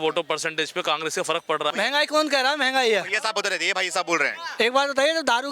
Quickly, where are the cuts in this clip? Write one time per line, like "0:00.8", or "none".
0:01.7